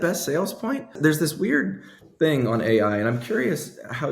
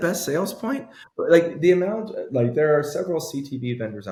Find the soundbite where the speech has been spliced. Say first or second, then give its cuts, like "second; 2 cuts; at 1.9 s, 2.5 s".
first; 1 cut; at 0.9 s